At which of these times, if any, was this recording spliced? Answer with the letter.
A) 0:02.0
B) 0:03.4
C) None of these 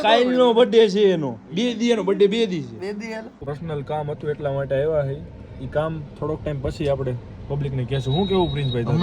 B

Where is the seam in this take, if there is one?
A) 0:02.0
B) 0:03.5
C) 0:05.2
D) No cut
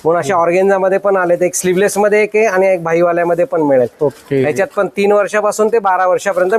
D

